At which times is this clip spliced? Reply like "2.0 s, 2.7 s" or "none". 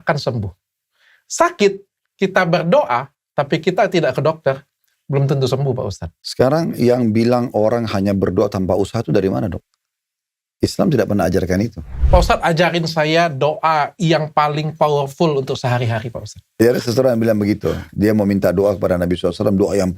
6.4 s, 12.0 s, 16.6 s

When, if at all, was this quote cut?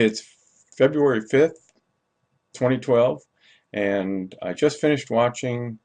2.2 s

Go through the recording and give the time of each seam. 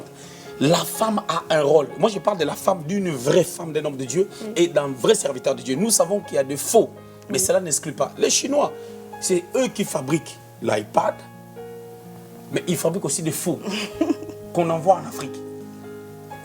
none

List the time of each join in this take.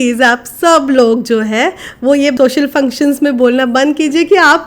2.3 s

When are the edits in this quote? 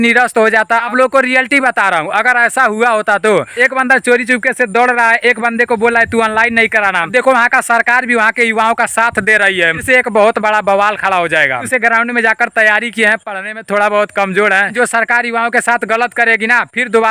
0.9 s, 3.5 s, 7.1 s, 9.8 s, 11.7 s, 14.7 s

